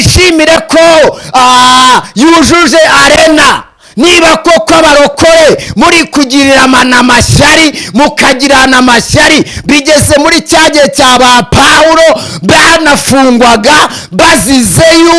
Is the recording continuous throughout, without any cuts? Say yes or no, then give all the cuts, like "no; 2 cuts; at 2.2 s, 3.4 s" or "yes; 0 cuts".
yes; 0 cuts